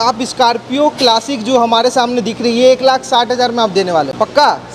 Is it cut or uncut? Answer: uncut